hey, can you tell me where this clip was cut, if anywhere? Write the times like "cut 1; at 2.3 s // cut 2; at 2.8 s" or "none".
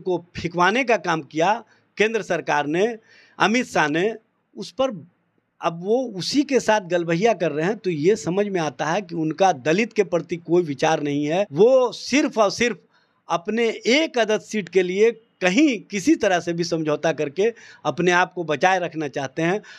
cut 1; at 11.5 s